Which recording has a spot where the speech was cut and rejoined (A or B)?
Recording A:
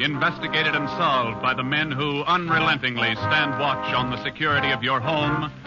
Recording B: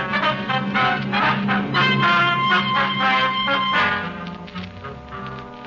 A